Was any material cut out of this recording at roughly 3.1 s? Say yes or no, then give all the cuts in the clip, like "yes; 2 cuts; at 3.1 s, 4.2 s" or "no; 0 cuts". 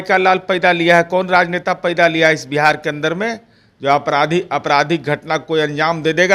no; 0 cuts